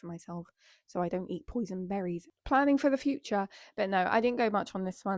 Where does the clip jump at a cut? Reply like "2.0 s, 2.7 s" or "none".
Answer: none